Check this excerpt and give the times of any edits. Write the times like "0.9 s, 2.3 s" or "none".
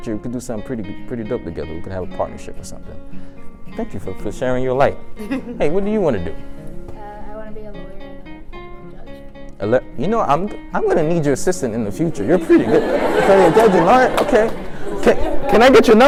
none